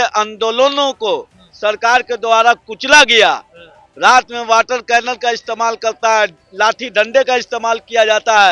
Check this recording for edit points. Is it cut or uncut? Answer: uncut